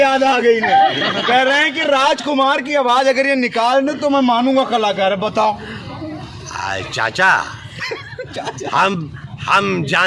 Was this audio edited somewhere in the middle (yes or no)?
no